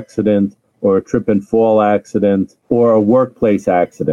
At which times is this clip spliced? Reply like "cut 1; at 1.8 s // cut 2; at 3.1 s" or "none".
cut 1; at 2.6 s

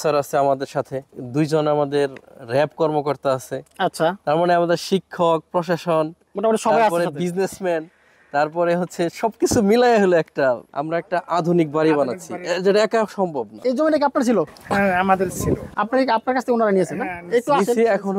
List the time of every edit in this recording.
cut 1; at 1.1 s // cut 2; at 10.7 s // cut 3; at 13.5 s

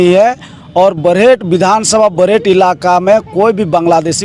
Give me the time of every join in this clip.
none

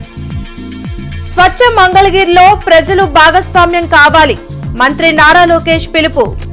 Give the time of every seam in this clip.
cut 1; at 0.9 s

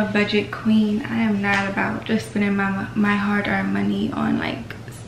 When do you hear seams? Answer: none

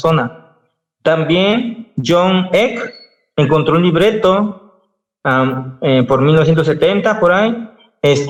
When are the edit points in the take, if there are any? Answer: none

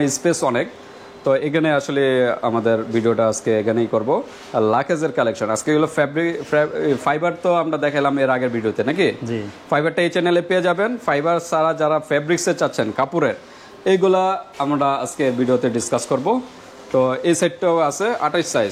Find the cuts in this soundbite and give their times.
none

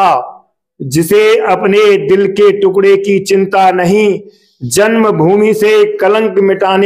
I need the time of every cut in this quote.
none

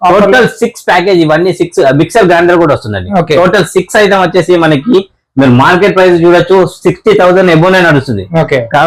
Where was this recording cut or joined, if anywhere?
none

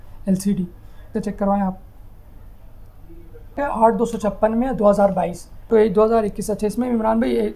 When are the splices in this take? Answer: cut 1; at 1.1 s // cut 2; at 3.6 s // cut 3; at 5.7 s

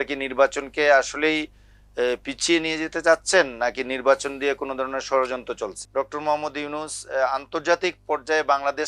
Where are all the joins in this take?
cut 1; at 5.8 s

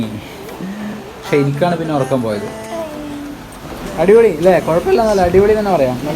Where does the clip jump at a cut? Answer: cut 1; at 2.7 s

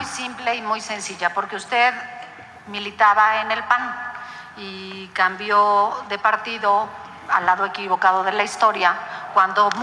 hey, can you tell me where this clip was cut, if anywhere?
none

